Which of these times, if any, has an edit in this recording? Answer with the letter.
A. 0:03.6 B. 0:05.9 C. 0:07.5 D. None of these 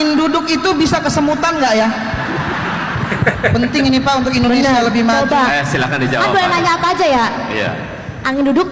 D